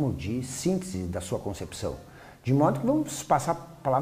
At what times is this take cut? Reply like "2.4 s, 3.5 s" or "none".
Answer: 2.9 s